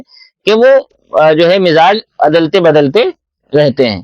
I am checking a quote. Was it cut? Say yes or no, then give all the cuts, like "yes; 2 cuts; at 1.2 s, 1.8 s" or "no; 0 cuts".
no; 0 cuts